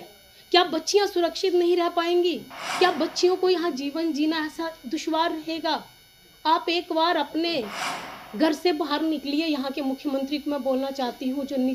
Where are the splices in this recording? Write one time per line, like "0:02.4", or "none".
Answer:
none